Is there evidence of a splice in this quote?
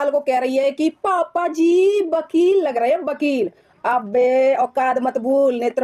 no; 0 cuts

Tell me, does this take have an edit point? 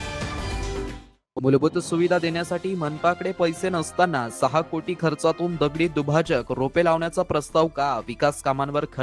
yes; 1 cut; at 1.0 s

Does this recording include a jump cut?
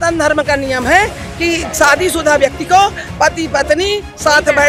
no; 0 cuts

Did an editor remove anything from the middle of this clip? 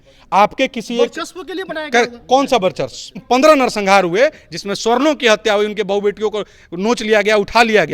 yes; 1 cut; at 3.2 s

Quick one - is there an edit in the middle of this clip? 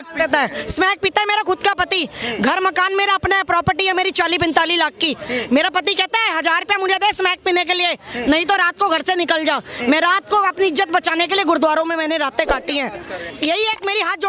yes; 1 cut; at 13.3 s

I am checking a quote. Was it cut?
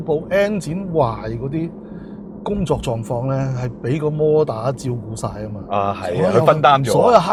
no; 0 cuts

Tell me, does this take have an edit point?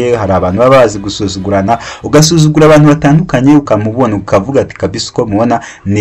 yes; 1 cut; at 3.7 s

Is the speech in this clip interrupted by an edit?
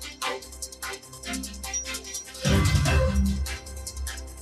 no; 0 cuts

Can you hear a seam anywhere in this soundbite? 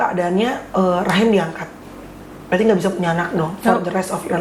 no; 0 cuts

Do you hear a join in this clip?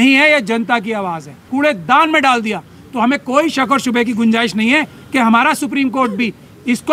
yes; 1 cut; at 1.4 s

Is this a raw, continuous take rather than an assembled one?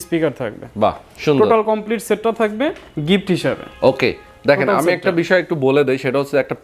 yes; 0 cuts

